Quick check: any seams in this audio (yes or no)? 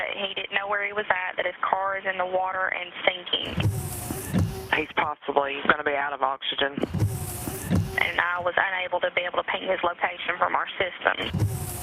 yes